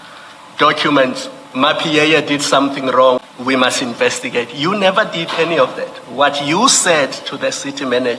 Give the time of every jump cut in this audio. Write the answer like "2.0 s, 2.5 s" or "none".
3.3 s